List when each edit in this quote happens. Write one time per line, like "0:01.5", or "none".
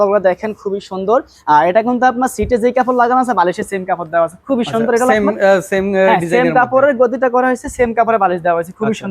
none